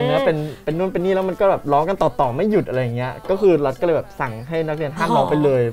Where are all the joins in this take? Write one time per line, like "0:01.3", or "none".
none